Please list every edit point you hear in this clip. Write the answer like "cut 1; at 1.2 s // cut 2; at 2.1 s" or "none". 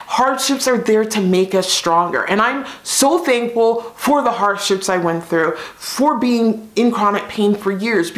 none